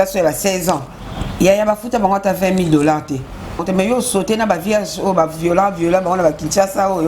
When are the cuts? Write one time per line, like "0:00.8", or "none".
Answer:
0:03.6